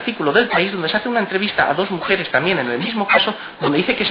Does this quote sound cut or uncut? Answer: cut